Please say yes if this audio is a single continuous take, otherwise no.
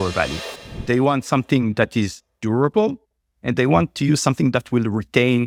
yes